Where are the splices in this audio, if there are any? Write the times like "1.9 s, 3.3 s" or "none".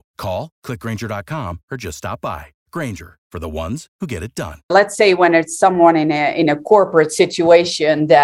4.7 s